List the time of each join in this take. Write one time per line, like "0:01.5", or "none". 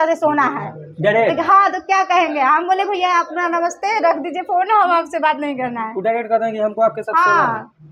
none